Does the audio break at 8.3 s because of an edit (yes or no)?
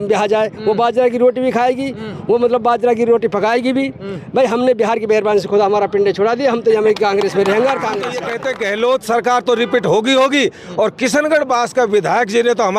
yes